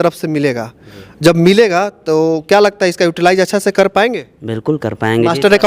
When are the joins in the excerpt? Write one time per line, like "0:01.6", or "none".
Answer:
none